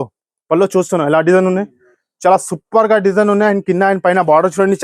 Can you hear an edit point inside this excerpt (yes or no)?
no